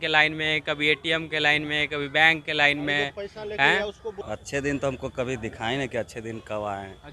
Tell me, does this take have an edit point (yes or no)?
yes